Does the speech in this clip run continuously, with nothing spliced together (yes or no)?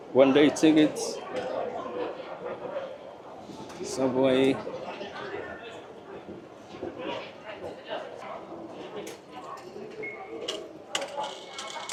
yes